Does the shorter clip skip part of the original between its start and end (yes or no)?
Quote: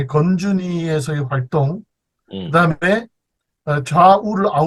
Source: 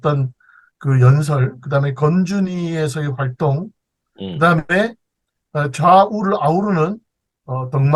no